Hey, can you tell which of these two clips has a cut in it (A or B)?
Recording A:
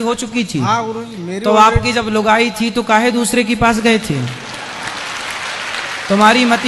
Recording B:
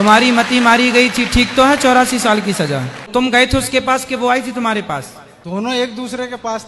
B